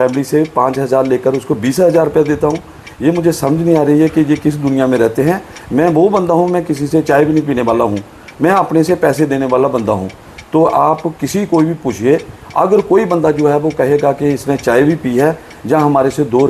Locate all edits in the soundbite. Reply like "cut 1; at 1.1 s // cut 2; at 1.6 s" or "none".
cut 1; at 10.3 s

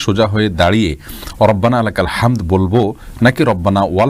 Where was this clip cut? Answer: none

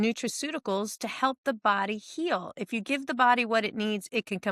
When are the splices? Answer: none

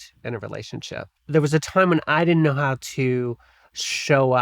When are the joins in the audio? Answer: cut 1; at 1.2 s

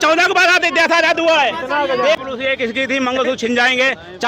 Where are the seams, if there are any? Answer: cut 1; at 2.2 s

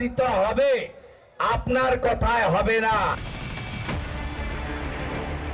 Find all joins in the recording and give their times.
cut 1; at 3.5 s

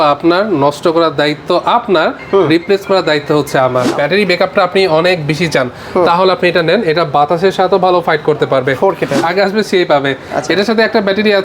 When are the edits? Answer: cut 1; at 3.9 s // cut 2; at 9.2 s

